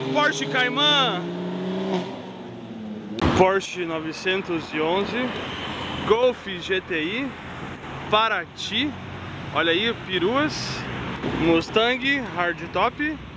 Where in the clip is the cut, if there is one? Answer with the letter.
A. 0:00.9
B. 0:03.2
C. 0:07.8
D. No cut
B